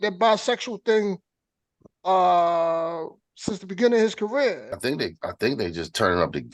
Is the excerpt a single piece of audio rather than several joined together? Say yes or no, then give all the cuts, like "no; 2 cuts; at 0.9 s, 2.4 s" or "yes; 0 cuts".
no; 1 cut; at 4.8 s